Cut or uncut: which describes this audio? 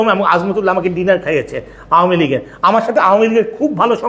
uncut